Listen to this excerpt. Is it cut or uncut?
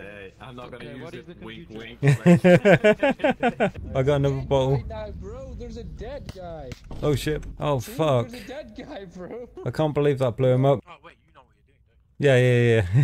cut